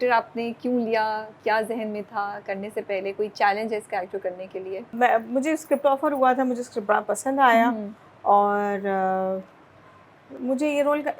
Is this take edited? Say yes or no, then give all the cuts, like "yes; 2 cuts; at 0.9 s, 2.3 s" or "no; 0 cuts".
no; 0 cuts